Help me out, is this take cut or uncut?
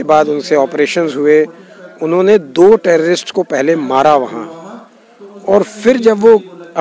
uncut